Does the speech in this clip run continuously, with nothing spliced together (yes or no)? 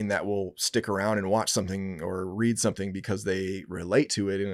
yes